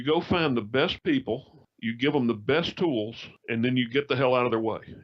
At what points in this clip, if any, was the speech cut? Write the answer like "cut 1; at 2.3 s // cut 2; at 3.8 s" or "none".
cut 1; at 1.0 s